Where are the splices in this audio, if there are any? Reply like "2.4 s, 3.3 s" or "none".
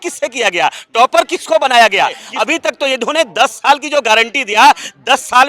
2.3 s